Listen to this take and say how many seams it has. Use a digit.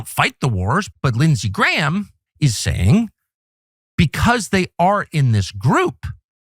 2